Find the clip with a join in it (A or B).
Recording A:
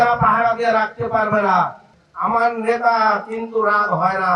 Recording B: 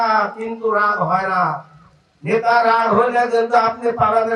A